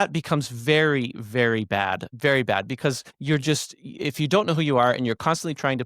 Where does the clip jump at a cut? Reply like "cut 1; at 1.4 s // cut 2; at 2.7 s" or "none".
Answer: cut 1; at 2.1 s // cut 2; at 3.1 s